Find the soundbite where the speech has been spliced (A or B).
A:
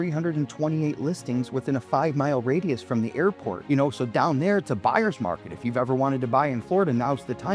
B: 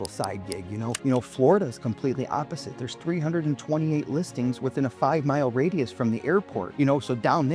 B